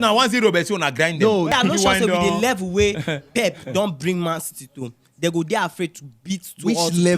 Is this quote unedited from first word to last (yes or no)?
no